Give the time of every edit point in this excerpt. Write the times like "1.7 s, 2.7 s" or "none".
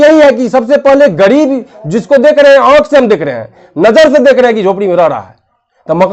none